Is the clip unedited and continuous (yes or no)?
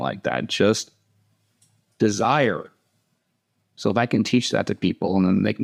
yes